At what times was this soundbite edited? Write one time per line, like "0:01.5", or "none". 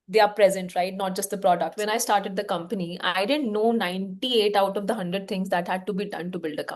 0:01.8